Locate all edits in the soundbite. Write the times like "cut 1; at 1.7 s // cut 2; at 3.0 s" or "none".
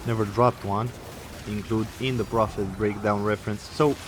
cut 1; at 1.3 s